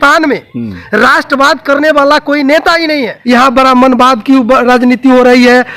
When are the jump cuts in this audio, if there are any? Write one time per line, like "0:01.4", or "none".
0:03.1